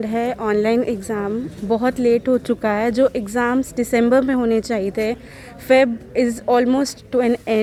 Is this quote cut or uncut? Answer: uncut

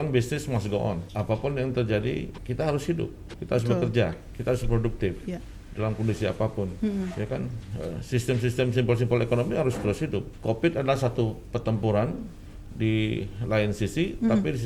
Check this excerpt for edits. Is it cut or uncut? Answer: cut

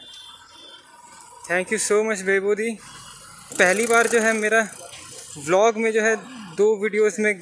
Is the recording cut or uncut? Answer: cut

